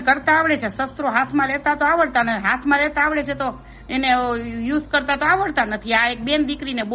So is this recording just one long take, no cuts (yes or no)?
yes